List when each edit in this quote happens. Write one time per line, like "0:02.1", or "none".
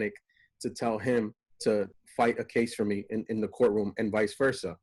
none